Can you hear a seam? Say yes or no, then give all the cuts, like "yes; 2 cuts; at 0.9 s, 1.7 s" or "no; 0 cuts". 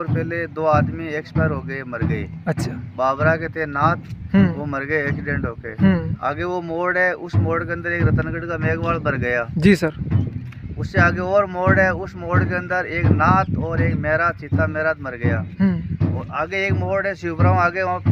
no; 0 cuts